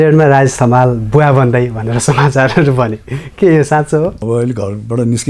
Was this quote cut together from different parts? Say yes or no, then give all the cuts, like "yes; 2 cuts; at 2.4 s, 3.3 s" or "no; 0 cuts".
yes; 1 cut; at 4.2 s